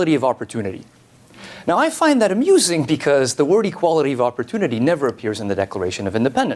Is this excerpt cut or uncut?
cut